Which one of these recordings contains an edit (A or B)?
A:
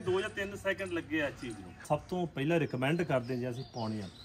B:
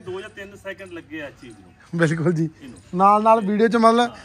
A